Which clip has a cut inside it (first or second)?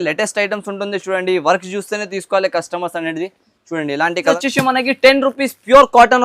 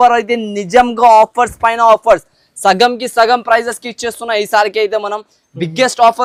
first